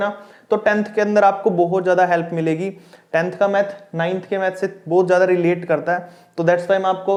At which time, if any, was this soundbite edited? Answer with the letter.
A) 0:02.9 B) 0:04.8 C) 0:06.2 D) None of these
D